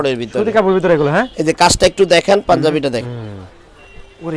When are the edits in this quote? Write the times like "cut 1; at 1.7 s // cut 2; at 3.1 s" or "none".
cut 1; at 3.0 s